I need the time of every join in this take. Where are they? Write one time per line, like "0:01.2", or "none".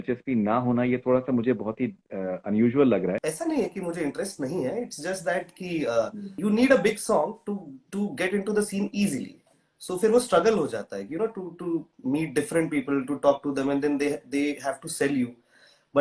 0:03.3
0:06.3

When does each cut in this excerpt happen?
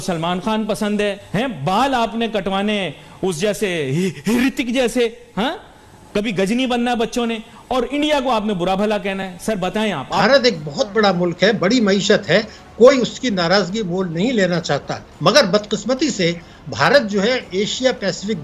0:01.2
0:10.2

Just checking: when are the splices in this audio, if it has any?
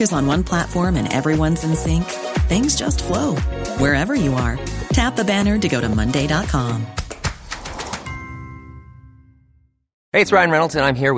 none

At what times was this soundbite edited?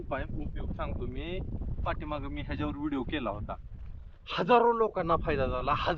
none

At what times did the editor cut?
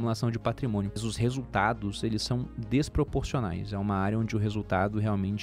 0:01.0

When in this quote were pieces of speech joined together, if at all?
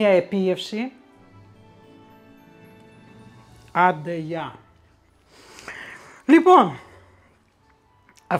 0:01.0
0:03.6

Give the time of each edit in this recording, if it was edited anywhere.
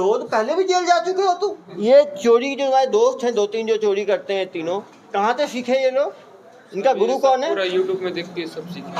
0:01.7

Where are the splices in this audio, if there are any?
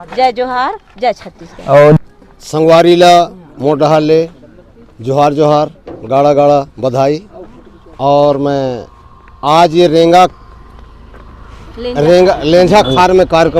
0:02.0

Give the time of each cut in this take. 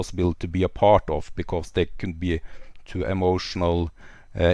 none

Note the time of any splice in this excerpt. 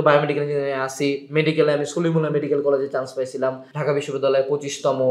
0:03.7

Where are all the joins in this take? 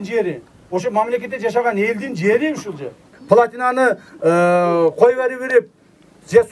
0:03.1

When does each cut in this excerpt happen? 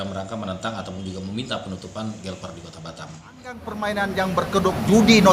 0:03.5

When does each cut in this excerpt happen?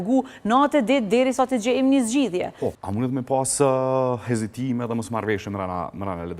0:02.8

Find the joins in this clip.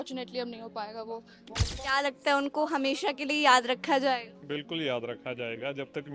0:01.4

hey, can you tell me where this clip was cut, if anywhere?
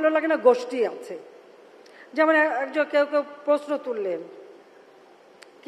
none

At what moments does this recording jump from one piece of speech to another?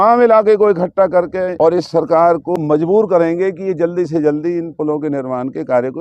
0:01.5
0:02.6

